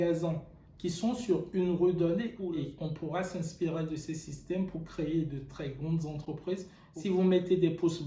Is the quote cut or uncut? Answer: cut